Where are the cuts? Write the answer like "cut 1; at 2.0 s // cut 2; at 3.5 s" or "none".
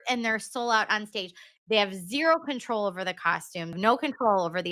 cut 1; at 1.5 s // cut 2; at 3.8 s